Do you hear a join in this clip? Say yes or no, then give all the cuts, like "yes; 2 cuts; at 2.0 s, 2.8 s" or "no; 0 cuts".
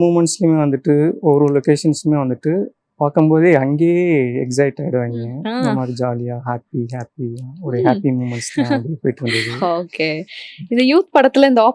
no; 0 cuts